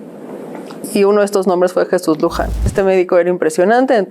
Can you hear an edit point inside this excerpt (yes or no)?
yes